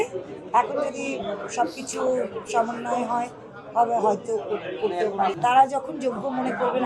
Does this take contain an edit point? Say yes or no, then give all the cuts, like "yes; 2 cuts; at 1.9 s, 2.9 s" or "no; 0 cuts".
yes; 1 cut; at 5.4 s